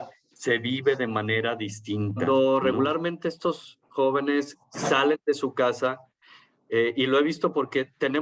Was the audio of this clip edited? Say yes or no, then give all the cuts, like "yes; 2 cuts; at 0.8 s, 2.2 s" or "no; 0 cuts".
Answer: yes; 1 cut; at 2.2 s